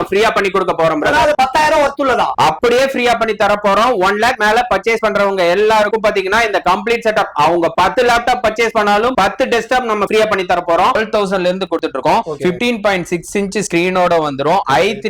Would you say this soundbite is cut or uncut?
cut